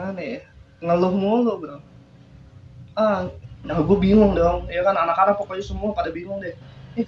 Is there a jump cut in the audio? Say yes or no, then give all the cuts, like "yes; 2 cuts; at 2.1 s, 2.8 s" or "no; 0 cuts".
yes; 1 cut; at 3.4 s